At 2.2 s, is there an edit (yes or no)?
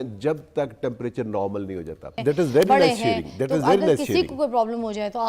yes